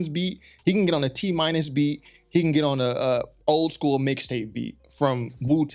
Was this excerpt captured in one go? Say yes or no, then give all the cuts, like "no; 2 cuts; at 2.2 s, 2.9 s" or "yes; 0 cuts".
yes; 0 cuts